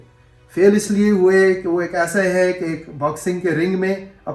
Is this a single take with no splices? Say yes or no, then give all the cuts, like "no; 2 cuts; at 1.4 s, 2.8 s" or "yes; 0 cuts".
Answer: yes; 0 cuts